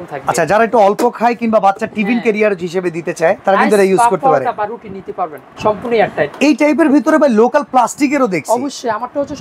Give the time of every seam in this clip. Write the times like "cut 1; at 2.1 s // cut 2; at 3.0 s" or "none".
cut 1; at 3.4 s // cut 2; at 5.5 s